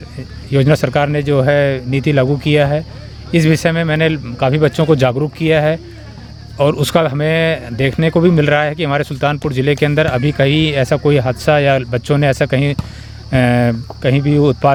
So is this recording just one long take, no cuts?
yes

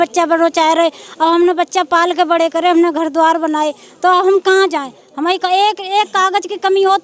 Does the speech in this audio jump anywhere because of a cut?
no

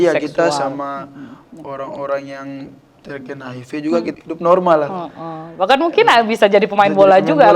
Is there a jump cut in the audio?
yes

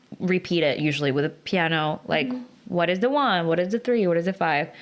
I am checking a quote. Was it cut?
no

